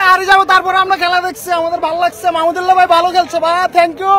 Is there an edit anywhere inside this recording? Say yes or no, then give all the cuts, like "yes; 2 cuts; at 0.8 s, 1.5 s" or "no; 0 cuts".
no; 0 cuts